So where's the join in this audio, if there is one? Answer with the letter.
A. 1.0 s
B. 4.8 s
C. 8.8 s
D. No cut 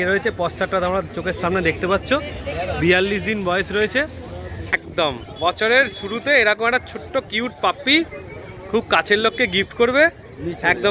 B